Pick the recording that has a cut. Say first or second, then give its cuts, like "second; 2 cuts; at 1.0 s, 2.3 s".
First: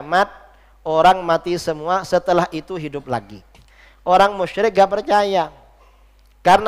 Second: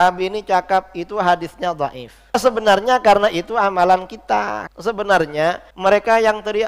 second; 3 cuts; at 2.4 s, 4.6 s, 5.7 s